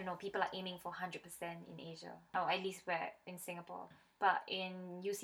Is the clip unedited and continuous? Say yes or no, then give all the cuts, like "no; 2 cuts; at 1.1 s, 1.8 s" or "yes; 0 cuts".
yes; 0 cuts